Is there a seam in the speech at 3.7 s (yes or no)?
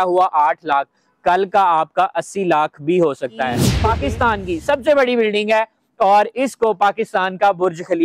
yes